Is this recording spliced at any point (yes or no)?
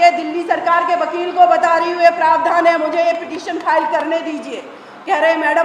no